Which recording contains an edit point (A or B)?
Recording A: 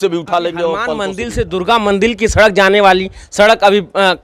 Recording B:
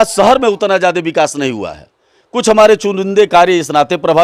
A